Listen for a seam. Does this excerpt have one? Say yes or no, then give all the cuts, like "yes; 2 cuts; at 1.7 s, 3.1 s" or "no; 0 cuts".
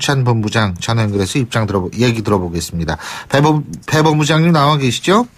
yes; 1 cut; at 4.4 s